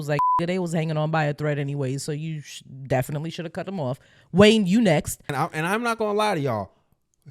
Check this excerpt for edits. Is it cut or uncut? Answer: cut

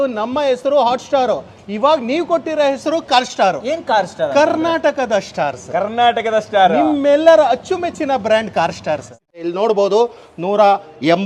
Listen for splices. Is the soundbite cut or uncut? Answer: cut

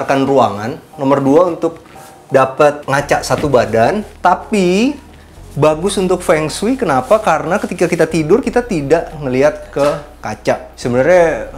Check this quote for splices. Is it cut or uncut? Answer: cut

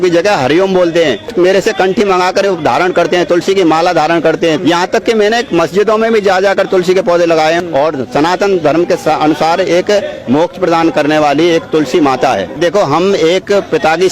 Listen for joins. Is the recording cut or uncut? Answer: cut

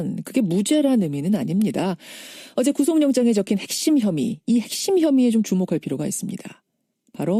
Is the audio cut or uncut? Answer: uncut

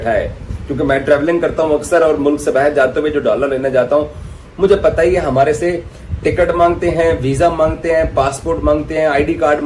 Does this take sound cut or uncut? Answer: uncut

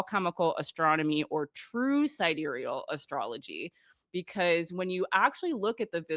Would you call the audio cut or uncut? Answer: uncut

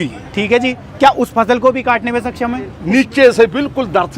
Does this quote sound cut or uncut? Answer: cut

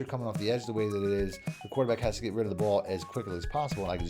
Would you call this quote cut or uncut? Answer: uncut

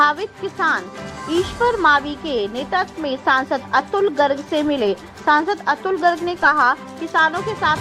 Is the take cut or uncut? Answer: uncut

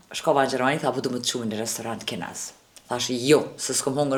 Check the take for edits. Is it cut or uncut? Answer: uncut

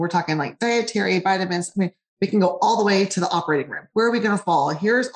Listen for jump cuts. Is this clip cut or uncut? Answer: cut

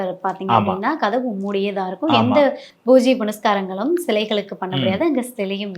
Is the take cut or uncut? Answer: uncut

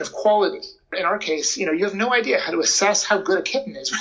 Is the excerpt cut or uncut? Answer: uncut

